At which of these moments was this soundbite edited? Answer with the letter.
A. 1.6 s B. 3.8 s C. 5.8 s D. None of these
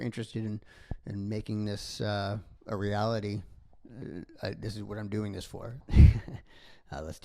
C